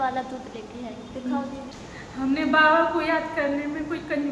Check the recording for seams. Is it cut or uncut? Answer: cut